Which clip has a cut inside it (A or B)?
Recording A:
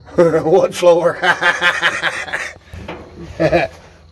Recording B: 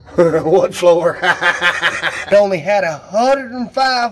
B